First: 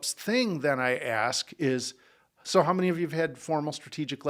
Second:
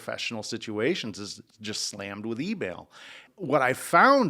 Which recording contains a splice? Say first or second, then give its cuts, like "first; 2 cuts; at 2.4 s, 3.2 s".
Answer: second; 1 cut; at 3.2 s